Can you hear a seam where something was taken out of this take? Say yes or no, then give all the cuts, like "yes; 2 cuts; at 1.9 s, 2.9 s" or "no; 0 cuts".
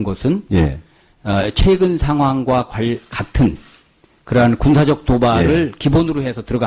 no; 0 cuts